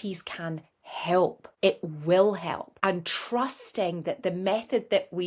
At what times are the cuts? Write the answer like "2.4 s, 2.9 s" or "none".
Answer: 1.4 s, 2.7 s